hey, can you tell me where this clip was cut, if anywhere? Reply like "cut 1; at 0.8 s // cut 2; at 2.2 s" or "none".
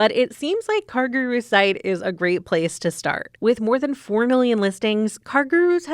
cut 1; at 3.3 s